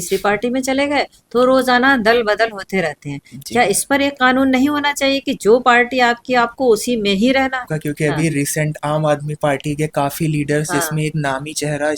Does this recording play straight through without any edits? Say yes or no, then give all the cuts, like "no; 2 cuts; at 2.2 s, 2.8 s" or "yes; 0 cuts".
no; 1 cut; at 7.6 s